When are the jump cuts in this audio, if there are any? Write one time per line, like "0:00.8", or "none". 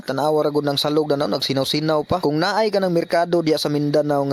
none